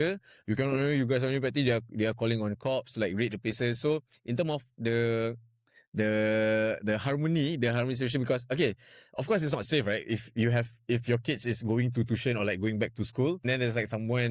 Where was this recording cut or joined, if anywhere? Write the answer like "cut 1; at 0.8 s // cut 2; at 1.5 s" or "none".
cut 1; at 13.4 s